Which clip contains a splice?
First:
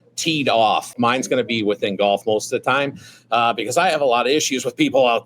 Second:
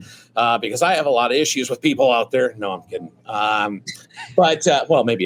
first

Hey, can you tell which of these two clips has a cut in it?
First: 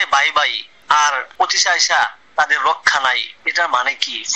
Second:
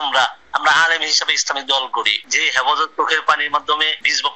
second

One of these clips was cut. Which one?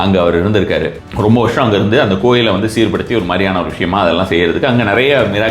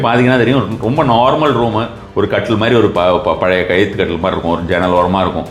first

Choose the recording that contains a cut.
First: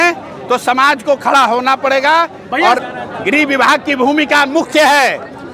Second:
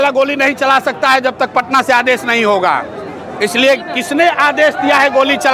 first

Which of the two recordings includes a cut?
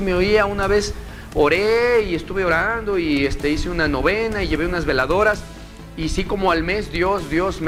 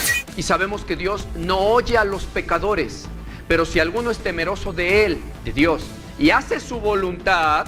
second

